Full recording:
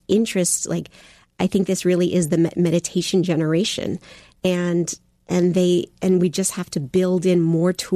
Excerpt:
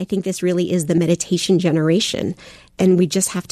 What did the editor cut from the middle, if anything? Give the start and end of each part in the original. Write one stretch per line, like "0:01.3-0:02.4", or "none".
0:02.4-0:02.6
0:04.3-0:05.9

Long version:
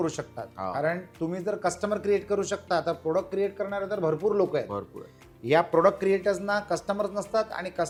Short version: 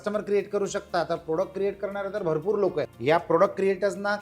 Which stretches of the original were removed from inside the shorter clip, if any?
0:04.7-0:05.4

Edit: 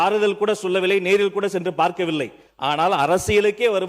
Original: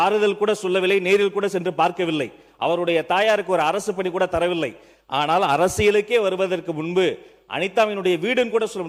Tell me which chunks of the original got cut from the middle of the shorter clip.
0:02.4-0:04.9

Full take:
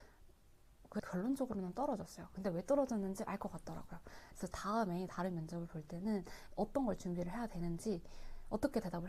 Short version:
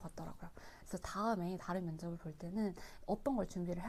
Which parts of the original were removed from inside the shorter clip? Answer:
none

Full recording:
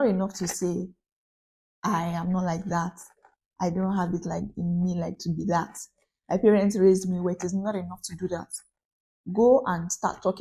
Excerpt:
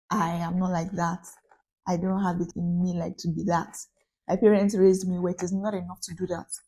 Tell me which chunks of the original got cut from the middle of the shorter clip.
0:04.2-0:04.5

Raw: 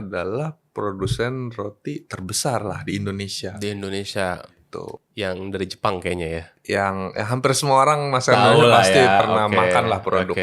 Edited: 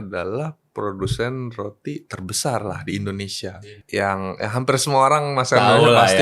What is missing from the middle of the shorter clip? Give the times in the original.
0:03.6-0:06.4

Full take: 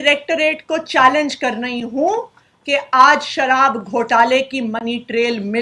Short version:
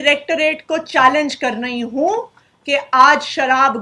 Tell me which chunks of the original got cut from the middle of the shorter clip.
none

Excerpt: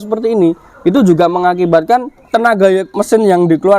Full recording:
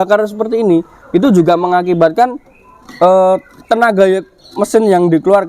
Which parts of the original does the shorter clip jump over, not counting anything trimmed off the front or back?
0:02.4-0:03.5
0:04.3-0:04.5

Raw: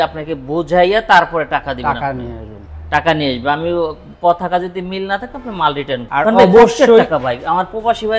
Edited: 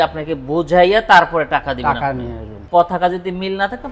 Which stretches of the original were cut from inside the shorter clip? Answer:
0:02.5-0:04.0

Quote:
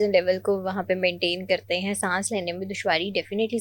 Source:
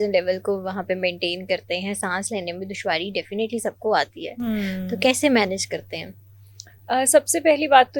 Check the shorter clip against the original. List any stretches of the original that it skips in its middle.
none

